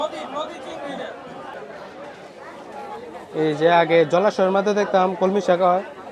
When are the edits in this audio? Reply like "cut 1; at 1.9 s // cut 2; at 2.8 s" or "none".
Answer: cut 1; at 1.5 s